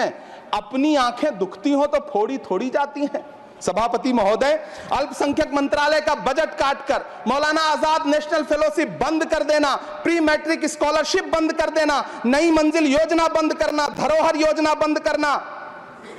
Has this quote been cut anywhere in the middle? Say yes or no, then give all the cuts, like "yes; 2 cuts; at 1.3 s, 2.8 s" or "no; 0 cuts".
no; 0 cuts